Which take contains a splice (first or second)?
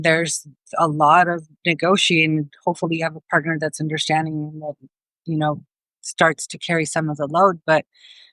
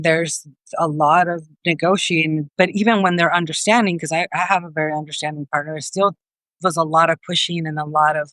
second